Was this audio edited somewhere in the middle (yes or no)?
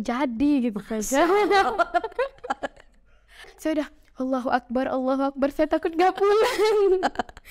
yes